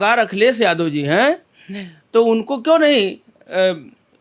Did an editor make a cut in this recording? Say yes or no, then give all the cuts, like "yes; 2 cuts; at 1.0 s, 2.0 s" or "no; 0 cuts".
no; 0 cuts